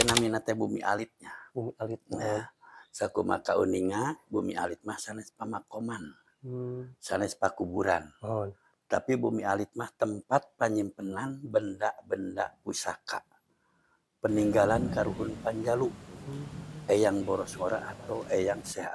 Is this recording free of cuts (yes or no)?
yes